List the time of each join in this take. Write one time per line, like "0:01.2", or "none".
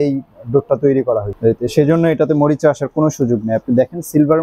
0:01.3

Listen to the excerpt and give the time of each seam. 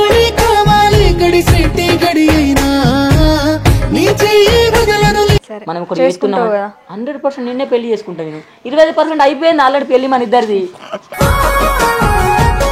0:05.5

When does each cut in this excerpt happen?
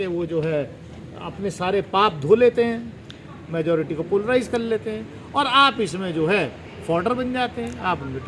none

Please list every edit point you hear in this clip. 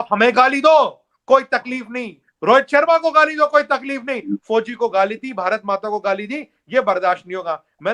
none

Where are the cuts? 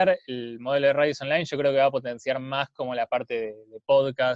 none

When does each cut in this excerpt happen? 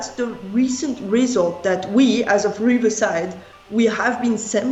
none

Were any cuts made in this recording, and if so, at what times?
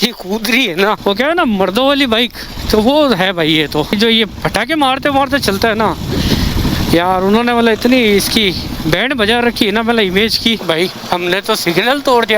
0:01.0
0:03.9
0:10.6

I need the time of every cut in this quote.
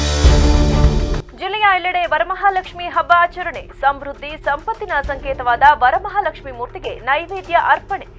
0:01.2

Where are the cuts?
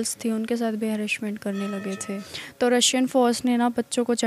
0:02.2
0:03.4

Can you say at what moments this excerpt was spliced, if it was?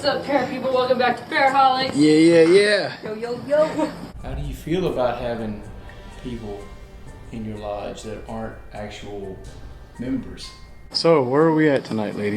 0:04.1
0:10.8

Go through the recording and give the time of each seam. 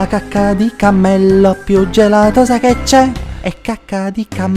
0:03.3

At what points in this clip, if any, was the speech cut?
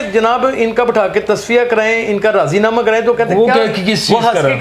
none

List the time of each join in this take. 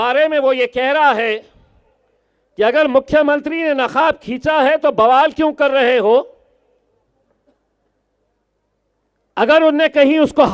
none

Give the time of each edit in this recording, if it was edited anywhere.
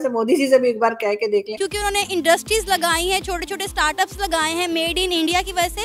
0:01.6

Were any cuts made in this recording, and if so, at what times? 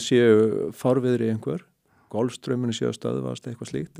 none

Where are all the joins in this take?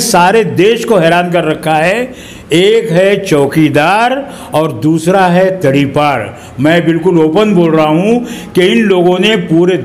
none

